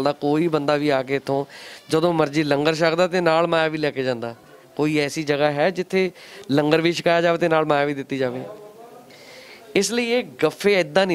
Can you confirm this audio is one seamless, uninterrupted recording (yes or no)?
yes